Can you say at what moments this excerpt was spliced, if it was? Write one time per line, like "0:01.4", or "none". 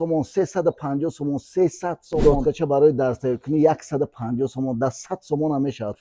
0:02.2